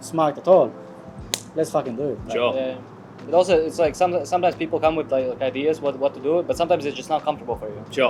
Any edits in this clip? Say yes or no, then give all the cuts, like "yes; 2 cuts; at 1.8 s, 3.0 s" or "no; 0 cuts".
no; 0 cuts